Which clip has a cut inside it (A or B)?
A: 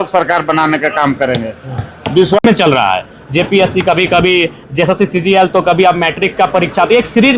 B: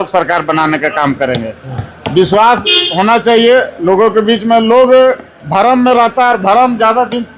A